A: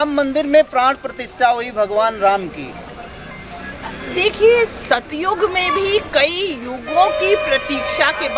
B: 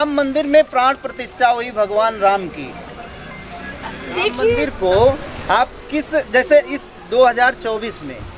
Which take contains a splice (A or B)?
B